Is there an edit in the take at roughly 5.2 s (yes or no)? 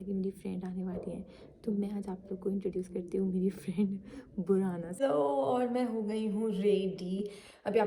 yes